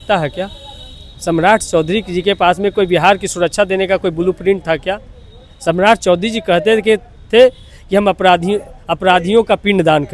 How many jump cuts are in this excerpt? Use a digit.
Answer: 0